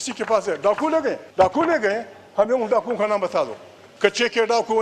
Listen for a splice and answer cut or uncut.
cut